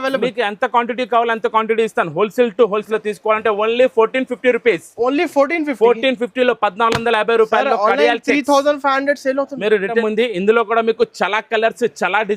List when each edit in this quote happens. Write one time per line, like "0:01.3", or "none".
0:02.8
0:10.0